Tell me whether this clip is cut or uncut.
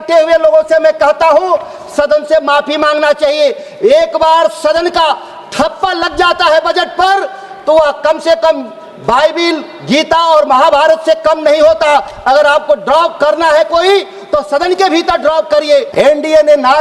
cut